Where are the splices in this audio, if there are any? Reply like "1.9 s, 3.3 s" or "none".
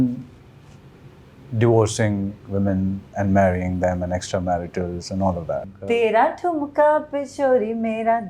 5.7 s